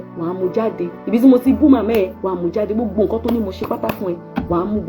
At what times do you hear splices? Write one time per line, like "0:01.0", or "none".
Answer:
0:01.0